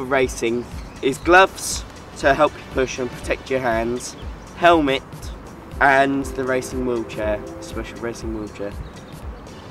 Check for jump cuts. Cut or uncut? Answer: uncut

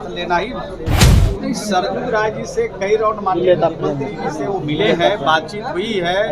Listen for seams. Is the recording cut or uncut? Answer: cut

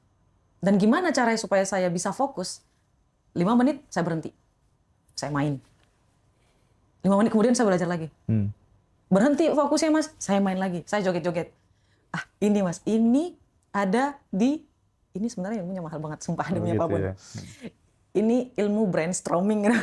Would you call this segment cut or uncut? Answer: uncut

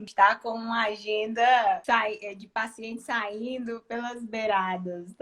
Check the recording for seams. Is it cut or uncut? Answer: uncut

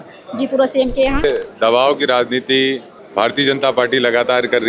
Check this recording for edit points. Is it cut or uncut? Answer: cut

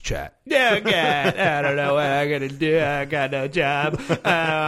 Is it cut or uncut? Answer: uncut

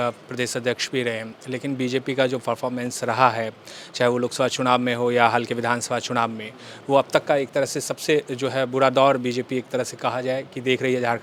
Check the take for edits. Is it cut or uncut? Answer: uncut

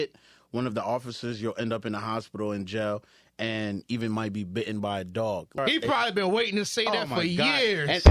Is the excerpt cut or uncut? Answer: cut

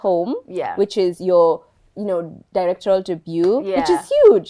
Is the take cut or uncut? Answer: uncut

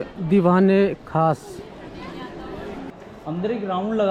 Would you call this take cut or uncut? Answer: cut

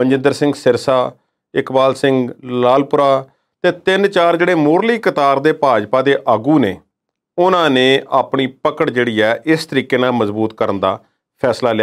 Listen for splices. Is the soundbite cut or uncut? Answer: uncut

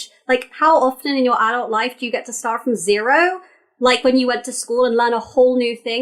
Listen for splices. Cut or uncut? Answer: uncut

